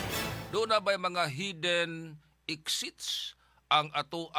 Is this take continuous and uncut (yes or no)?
yes